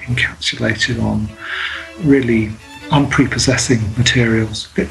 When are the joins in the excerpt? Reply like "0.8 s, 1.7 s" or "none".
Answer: 2.7 s